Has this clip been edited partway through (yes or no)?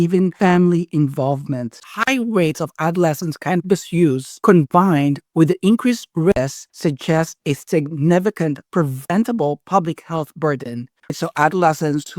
yes